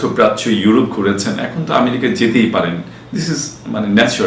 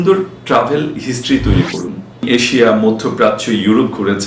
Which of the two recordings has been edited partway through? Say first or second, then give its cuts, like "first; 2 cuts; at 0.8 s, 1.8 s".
second; 1 cut; at 2.1 s